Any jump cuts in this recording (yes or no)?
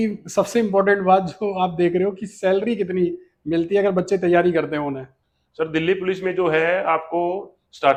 no